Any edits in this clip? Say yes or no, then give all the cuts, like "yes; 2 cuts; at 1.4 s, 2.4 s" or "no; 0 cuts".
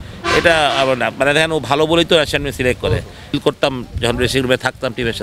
yes; 1 cut; at 3.3 s